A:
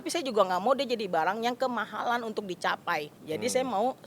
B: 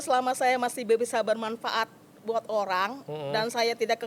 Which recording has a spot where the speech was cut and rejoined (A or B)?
A